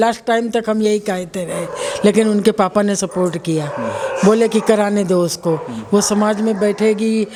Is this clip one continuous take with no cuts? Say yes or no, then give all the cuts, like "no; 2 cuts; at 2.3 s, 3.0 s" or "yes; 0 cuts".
yes; 0 cuts